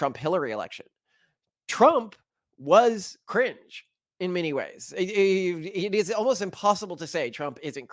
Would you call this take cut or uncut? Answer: uncut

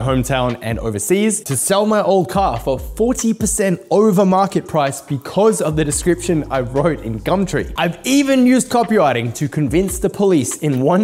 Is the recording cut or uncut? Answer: cut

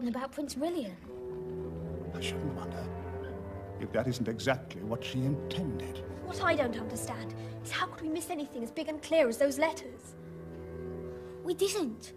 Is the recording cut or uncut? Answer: uncut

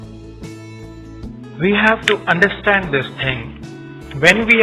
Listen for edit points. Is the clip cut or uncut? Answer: cut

